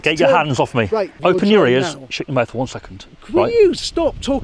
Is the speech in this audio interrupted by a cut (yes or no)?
yes